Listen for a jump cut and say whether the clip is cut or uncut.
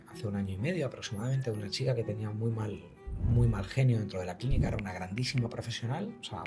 uncut